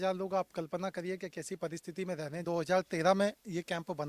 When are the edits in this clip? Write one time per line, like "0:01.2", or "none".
0:02.4